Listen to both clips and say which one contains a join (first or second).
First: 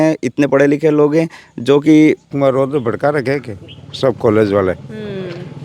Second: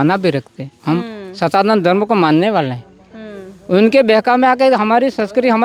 first